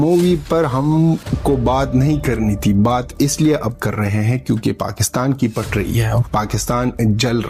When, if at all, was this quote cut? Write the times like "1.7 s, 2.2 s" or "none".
none